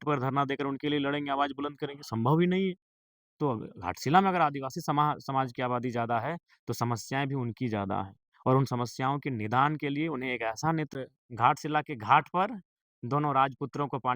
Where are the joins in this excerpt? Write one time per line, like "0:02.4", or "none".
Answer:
0:10.9